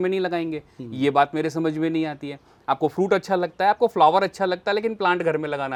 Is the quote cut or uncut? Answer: uncut